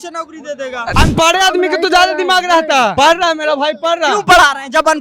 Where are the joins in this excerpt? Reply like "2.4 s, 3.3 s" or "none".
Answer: 0.9 s, 2.9 s

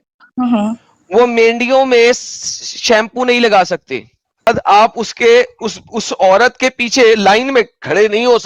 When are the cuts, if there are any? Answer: 4.5 s

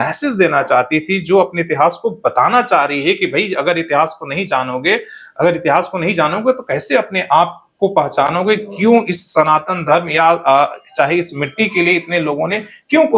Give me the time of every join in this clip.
none

